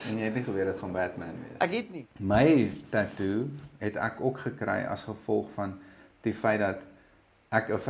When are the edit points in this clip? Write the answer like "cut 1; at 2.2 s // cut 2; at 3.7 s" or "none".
cut 1; at 1.9 s